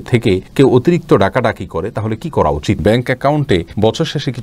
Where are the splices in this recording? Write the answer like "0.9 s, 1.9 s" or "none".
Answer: 2.8 s